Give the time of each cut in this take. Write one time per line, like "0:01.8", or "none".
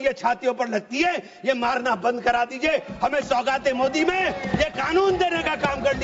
none